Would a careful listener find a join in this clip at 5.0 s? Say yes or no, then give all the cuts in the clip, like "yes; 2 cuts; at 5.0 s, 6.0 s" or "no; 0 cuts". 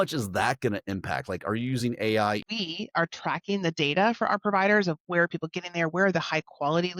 no; 1 cut; at 2.4 s